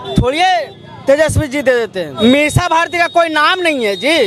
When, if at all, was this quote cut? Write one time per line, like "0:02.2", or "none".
0:02.1

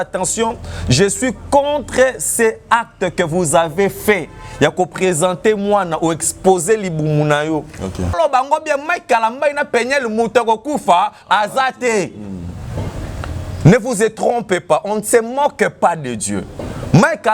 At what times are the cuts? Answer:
0:08.1

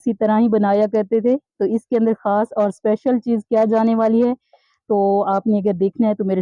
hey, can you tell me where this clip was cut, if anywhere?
none

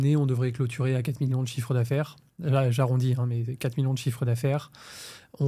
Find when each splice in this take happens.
none

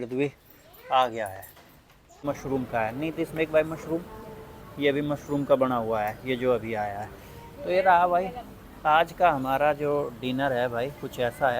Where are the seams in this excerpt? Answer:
0:02.2

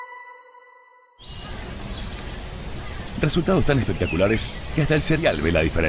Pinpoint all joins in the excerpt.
0:01.3

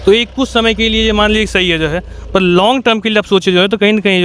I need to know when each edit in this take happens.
none

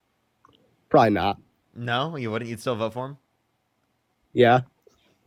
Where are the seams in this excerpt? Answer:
none

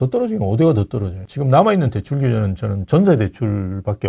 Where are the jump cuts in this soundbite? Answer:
0:01.2

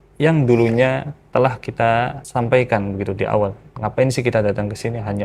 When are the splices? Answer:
0:01.1
0:02.2

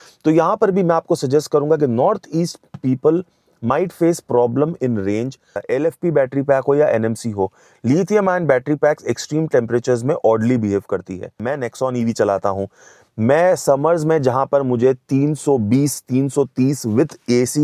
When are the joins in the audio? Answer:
0:05.6
0:11.4

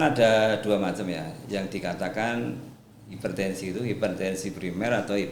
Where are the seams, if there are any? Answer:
none

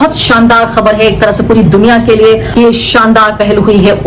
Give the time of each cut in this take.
0:02.5

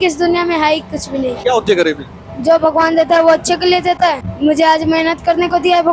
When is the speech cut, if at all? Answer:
0:01.4
0:04.3

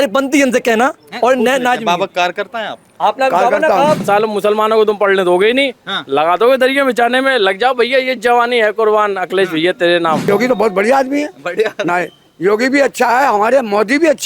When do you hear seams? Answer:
0:04.0
0:10.3

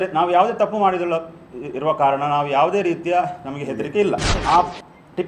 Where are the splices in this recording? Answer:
0:04.3

